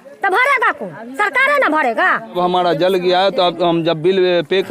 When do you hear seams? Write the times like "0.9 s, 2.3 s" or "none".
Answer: none